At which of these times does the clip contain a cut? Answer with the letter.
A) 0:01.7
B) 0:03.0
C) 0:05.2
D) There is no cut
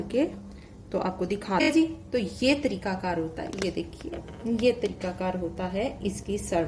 A